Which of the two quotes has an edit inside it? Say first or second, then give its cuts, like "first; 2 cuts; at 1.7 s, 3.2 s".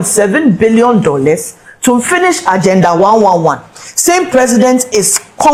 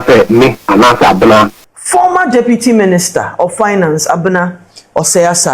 second; 1 cut; at 1.6 s